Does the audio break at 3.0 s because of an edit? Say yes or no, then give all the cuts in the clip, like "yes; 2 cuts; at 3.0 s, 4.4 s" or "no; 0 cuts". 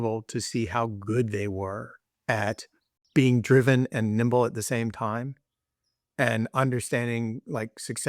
yes; 1 cut; at 3.0 s